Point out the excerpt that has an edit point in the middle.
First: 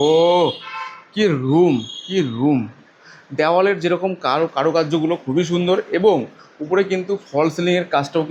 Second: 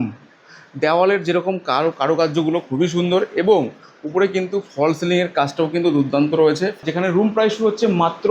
second; 1 cut; at 6.8 s

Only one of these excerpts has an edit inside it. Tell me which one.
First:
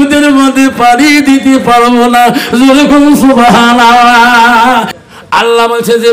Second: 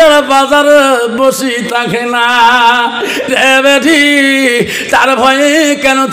first; 1 cut; at 5.0 s

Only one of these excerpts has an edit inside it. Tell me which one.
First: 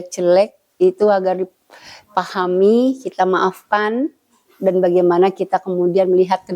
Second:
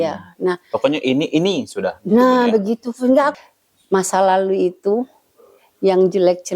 second; 1 cut; at 3.3 s

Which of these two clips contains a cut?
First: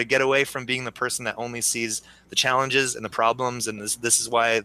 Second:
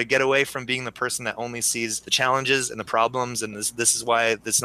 second; 1 cut; at 2.0 s

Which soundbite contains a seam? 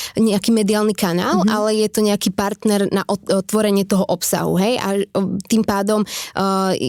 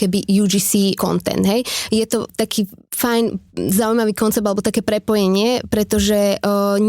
second; 2 cuts; at 1.0 s, 2.3 s

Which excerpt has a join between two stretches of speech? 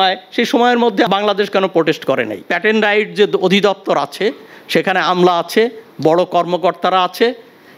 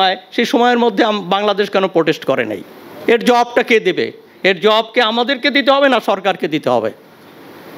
first; 2 cuts; at 1.1 s, 2.4 s

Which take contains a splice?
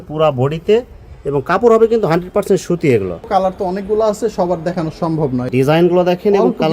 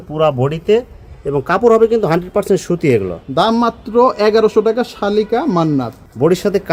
first; 2 cuts; at 3.2 s, 5.4 s

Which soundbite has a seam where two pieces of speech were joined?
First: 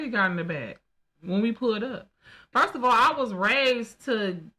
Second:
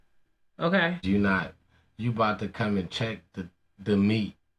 second; 1 cut; at 1.0 s

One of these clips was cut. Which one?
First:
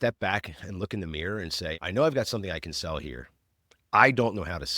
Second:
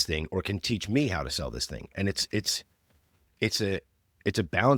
first; 1 cut; at 1.8 s

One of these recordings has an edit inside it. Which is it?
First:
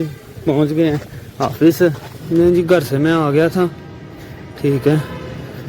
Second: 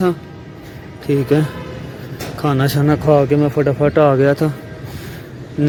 first; 1 cut; at 2.1 s

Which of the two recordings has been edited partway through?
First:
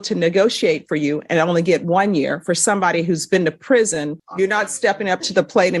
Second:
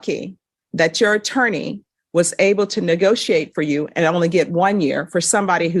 first; 1 cut; at 4.2 s

